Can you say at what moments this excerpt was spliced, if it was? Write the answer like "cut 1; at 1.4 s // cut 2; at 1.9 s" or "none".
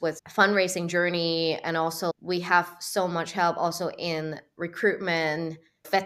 cut 1; at 2.1 s

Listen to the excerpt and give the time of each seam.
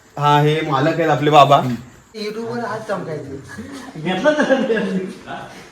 cut 1; at 2.2 s

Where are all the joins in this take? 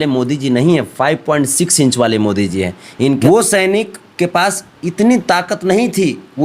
cut 1; at 3.2 s

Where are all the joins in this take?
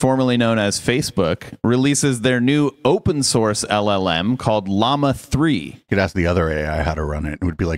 cut 1; at 5.8 s

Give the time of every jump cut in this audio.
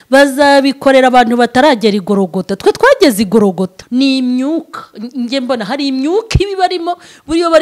cut 1; at 3.7 s

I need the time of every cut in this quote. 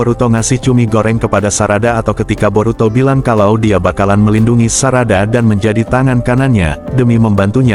none

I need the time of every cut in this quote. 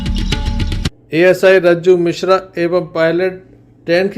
cut 1; at 0.9 s

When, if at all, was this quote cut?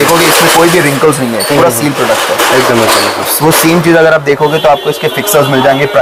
none

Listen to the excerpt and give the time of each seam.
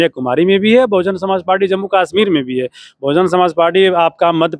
none

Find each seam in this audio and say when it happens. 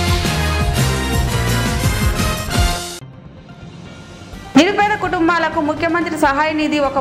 cut 1; at 4.5 s

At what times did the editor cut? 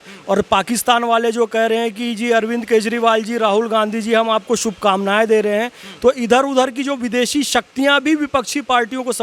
none

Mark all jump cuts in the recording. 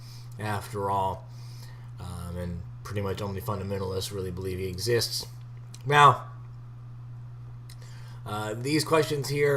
cut 1; at 7.5 s

